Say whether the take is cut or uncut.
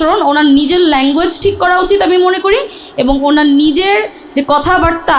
uncut